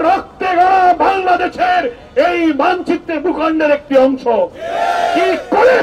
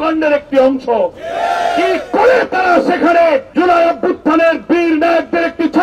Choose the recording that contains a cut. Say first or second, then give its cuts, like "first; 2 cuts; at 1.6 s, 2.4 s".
second; 1 cut; at 3.5 s